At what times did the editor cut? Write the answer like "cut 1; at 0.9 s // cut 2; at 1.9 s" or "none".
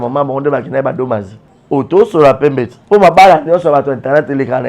cut 1; at 2.7 s